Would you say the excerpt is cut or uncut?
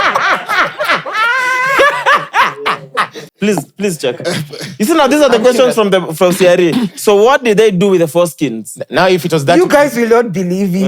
cut